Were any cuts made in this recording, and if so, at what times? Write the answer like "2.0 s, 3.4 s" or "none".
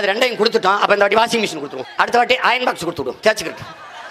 1.8 s